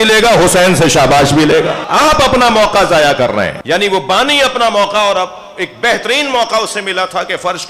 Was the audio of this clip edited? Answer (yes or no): yes